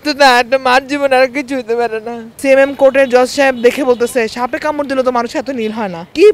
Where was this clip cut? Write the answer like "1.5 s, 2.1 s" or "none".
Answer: 2.3 s